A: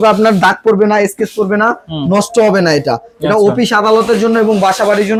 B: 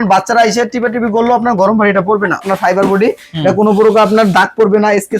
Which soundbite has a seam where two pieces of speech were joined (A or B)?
B